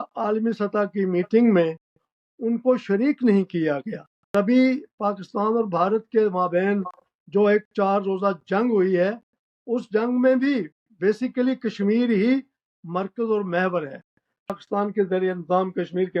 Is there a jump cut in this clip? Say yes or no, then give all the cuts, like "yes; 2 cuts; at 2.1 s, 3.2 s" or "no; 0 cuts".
yes; 2 cuts; at 4.3 s, 14.5 s